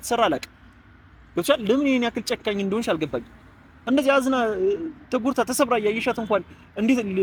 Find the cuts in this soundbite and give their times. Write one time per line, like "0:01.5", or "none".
none